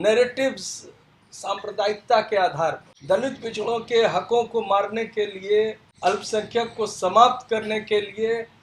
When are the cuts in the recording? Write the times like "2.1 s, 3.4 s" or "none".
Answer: 2.9 s, 5.8 s